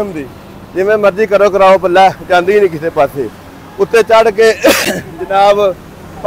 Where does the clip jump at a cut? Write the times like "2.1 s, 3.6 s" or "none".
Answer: none